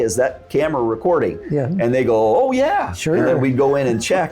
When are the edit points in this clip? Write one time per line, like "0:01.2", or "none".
none